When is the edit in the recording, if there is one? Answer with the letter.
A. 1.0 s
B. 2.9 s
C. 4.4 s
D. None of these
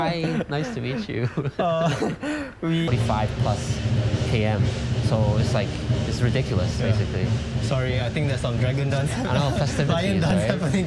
B